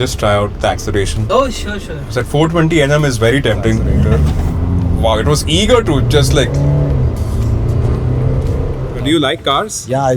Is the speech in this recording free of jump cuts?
no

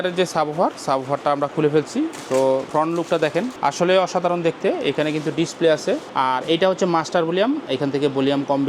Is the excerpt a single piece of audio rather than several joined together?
no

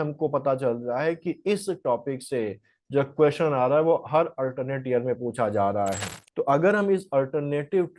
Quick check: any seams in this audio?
yes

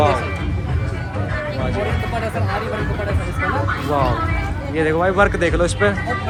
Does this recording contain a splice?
no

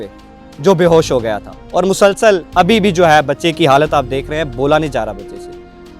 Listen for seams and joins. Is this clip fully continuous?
no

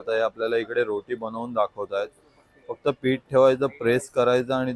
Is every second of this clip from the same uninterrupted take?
yes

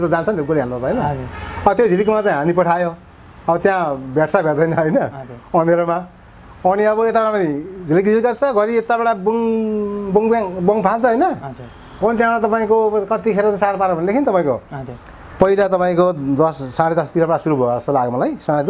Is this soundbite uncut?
yes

